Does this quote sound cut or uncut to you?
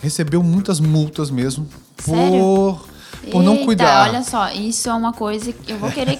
uncut